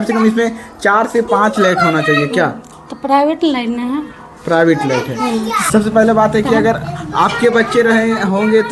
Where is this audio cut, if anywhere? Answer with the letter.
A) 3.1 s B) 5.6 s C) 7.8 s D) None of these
B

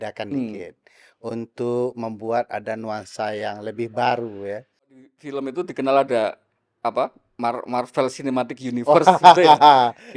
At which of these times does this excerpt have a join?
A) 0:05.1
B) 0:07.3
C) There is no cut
A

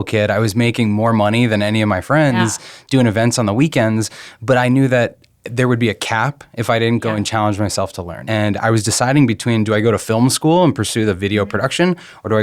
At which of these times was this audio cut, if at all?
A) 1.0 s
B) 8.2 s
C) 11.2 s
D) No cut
B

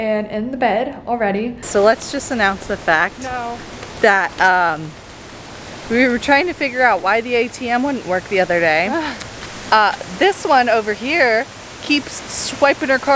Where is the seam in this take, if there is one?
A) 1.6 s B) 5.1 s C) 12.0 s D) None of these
A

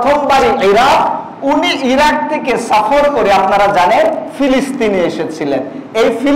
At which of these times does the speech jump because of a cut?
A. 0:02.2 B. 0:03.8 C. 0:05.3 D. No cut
D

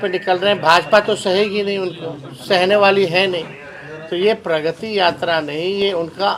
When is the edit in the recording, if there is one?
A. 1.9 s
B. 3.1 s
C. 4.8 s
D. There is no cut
D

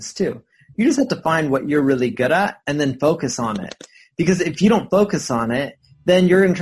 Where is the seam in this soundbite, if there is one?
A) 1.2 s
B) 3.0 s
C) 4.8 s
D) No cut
D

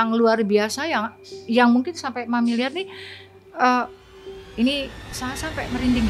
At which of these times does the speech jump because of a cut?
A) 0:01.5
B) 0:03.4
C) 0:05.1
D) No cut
D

